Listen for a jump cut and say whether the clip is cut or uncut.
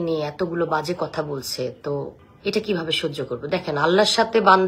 cut